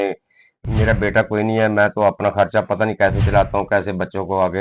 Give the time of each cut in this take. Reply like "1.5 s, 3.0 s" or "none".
none